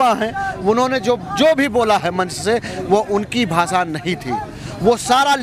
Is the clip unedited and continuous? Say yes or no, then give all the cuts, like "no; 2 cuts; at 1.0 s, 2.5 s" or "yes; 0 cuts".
yes; 0 cuts